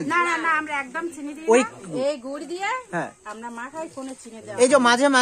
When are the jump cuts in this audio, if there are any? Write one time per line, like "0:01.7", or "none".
0:01.9